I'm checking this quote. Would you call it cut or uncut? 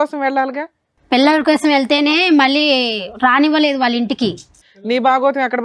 cut